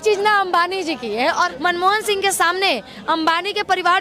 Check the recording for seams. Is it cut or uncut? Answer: cut